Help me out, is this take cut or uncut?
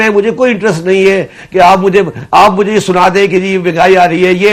uncut